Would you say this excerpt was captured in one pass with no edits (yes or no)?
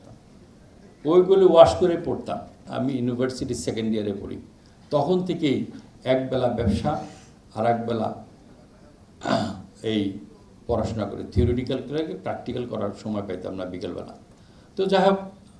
no